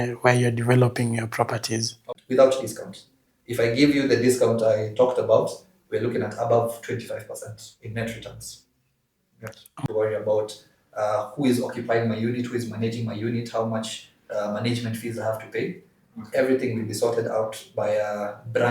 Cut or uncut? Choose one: cut